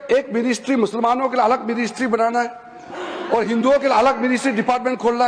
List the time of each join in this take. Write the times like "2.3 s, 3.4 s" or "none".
none